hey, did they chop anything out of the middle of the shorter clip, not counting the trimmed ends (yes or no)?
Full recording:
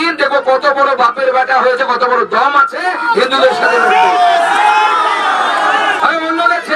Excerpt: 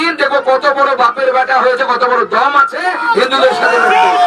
no